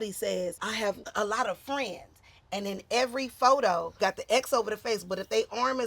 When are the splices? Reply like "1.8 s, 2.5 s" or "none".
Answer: 1.0 s, 3.9 s